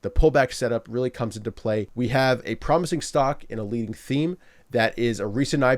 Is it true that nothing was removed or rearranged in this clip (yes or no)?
no